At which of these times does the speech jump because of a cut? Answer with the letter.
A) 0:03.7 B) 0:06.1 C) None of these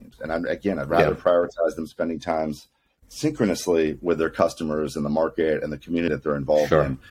B